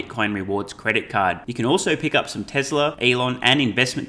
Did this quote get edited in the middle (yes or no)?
yes